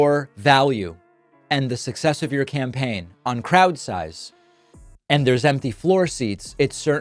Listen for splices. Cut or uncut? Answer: uncut